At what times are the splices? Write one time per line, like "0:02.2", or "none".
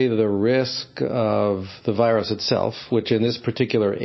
none